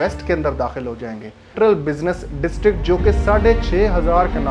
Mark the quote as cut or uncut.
cut